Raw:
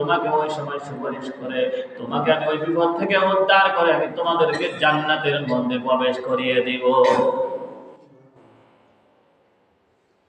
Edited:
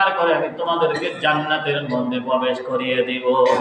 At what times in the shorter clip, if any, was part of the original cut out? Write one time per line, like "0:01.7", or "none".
none